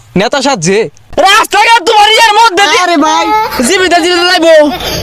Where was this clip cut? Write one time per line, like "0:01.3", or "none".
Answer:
0:01.0